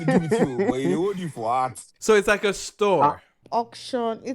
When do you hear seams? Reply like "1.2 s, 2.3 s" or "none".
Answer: 1.9 s, 3.3 s